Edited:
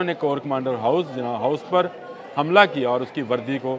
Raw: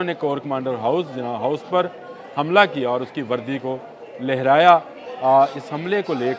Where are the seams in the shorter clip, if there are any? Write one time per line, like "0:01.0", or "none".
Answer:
none